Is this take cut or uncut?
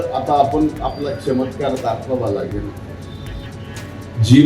cut